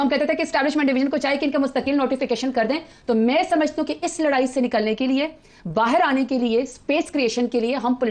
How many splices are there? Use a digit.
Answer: 0